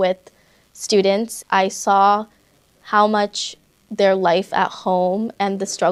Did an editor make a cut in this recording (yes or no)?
yes